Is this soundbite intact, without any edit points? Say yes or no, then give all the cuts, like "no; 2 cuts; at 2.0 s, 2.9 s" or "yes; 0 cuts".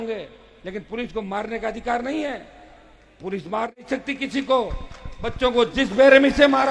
yes; 0 cuts